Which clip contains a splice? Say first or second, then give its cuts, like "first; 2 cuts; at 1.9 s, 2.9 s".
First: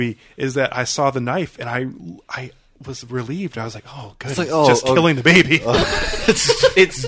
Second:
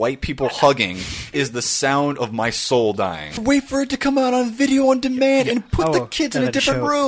second; 2 cuts; at 1.3 s, 3.4 s